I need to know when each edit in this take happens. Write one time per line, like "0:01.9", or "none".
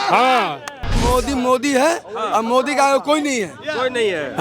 0:01.0